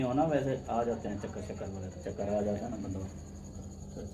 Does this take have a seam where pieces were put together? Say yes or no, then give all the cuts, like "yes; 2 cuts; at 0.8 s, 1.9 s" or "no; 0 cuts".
no; 0 cuts